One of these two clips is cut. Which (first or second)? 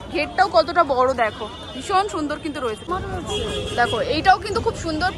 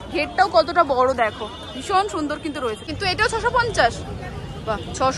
second